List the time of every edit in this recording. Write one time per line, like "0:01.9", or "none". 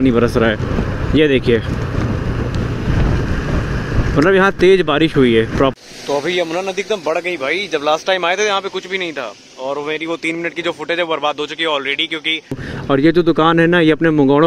0:05.7
0:12.7